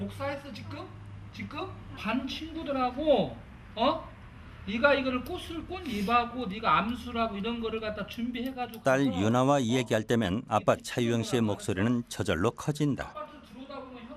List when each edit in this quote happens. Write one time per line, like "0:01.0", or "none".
0:01.8